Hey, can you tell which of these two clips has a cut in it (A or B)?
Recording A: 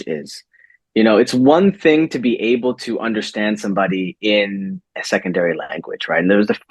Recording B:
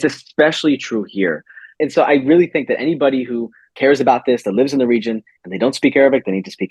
B